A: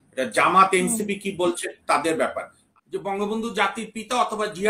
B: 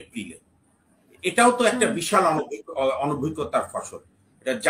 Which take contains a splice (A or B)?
A